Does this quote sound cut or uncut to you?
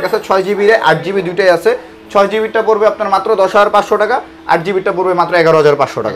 uncut